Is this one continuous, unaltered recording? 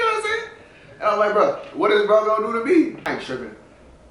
no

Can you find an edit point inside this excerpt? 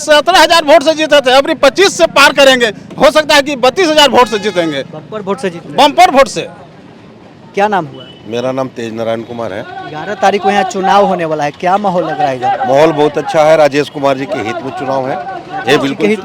no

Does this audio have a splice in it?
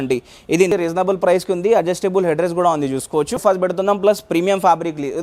yes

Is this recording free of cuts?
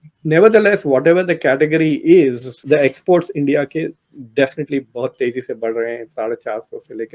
yes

